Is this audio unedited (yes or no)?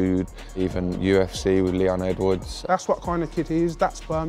no